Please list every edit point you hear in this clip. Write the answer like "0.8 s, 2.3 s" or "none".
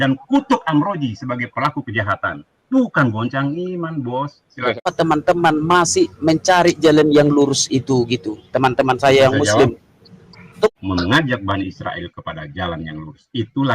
4.8 s, 10.7 s